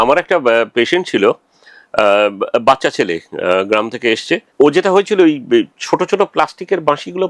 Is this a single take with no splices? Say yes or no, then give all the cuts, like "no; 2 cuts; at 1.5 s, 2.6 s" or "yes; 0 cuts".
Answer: no; 1 cut; at 4.5 s